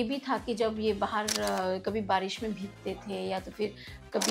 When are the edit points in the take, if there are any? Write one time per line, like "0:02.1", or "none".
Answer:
none

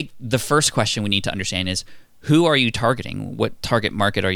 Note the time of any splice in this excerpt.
none

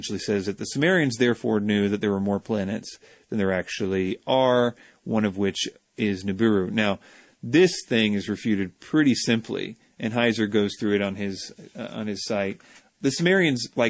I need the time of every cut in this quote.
none

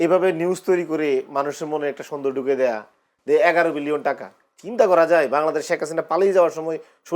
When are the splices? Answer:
none

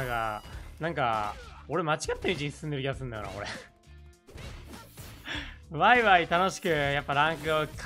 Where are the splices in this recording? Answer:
none

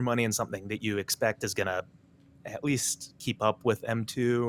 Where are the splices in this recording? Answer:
none

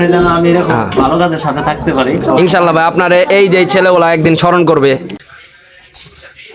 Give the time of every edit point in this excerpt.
0:05.2

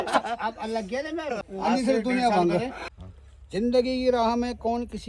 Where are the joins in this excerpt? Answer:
0:01.5
0:02.8

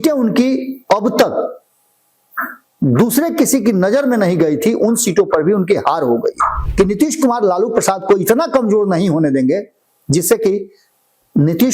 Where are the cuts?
0:06.6

